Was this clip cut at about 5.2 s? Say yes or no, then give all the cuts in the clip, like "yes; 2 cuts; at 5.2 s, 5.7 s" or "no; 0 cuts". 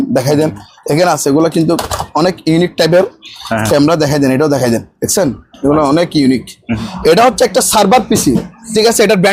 no; 1 cut; at 6.9 s